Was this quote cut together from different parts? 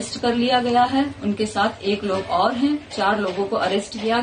no; 0 cuts

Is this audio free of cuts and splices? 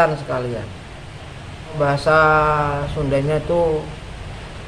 no; 1 cut; at 1.8 s

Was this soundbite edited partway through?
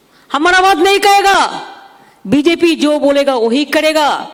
no; 0 cuts

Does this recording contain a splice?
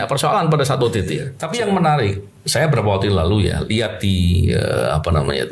no; 0 cuts

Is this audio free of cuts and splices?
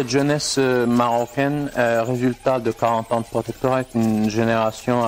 yes; 0 cuts

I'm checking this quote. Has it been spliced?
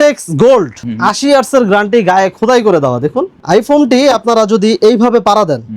no; 0 cuts

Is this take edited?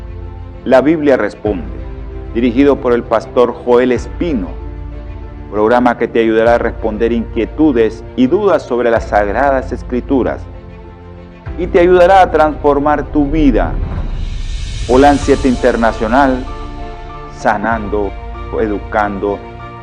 no; 0 cuts

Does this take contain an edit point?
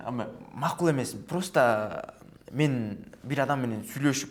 no; 0 cuts

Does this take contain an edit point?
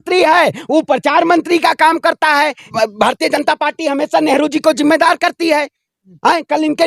yes; 1 cut; at 2.7 s

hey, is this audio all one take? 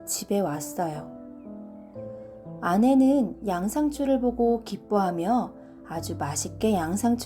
no; 2 cuts; at 1.0 s, 2.5 s

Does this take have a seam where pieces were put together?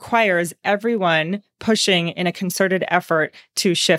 no; 0 cuts

